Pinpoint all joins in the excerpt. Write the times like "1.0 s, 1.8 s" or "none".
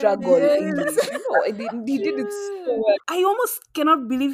3.1 s